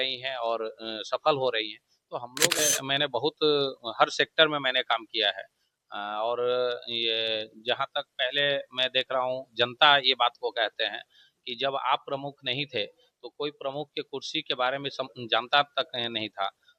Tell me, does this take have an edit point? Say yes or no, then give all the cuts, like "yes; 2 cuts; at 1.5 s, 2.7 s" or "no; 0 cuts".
yes; 1 cut; at 2.6 s